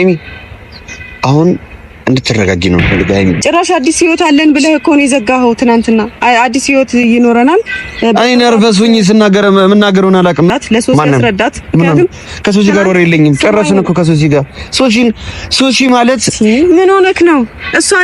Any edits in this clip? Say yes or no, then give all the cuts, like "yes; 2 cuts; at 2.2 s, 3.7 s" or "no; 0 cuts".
yes; 2 cuts; at 3.4 s, 10.5 s